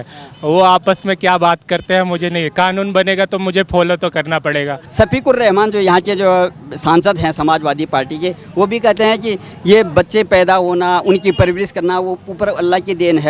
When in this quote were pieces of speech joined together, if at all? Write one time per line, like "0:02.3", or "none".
0:04.8